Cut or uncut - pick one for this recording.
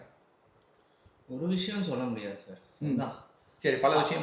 uncut